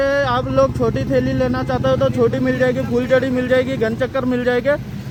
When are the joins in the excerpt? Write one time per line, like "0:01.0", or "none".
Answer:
none